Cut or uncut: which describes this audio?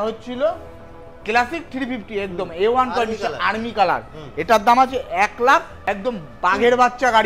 cut